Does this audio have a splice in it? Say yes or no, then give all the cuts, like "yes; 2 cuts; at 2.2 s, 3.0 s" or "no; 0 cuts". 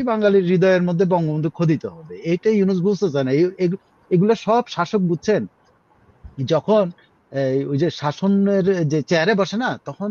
no; 0 cuts